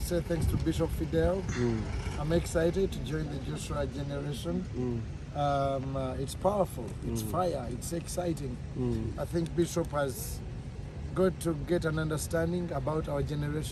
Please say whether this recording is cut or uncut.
uncut